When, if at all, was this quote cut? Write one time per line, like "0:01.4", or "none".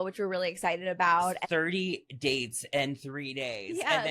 0:01.4